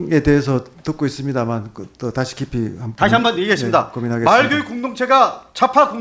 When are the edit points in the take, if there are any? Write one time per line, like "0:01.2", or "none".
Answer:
none